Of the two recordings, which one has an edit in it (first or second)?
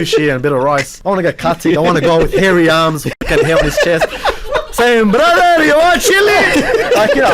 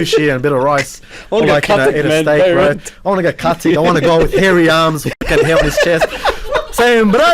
first